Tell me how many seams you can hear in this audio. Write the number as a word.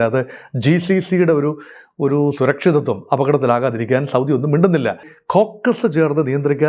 one